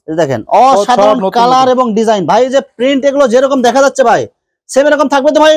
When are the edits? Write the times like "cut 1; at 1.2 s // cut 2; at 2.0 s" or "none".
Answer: none